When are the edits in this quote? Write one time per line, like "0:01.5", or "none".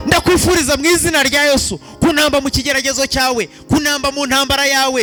none